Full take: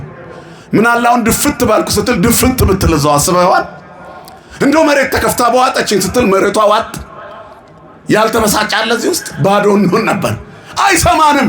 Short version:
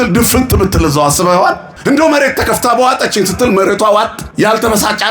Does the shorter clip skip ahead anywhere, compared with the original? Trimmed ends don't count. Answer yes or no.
yes